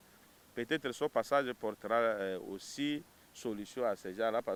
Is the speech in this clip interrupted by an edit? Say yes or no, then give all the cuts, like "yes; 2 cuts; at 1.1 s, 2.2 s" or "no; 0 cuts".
no; 0 cuts